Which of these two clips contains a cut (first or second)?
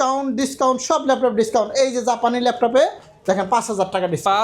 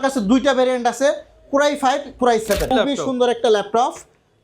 second